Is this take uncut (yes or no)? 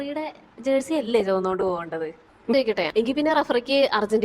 no